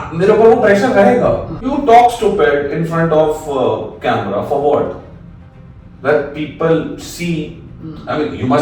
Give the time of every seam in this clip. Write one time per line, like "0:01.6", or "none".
0:01.6